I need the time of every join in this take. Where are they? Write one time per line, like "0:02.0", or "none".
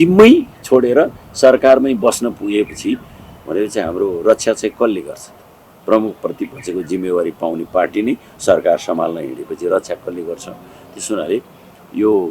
none